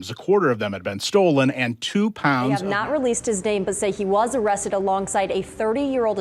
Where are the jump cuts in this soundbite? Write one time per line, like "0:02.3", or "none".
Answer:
0:02.6